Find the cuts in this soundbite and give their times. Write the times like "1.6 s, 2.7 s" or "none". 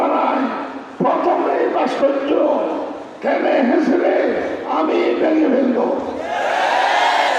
none